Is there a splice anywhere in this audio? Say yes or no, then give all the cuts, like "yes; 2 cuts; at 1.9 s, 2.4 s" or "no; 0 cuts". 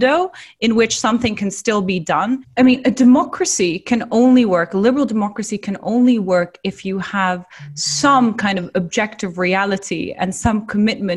yes; 1 cut; at 2.5 s